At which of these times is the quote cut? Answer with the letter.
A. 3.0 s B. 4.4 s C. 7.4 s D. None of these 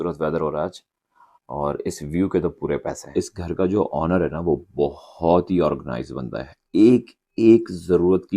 A